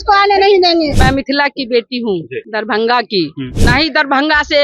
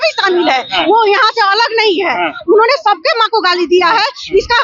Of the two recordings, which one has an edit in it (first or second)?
first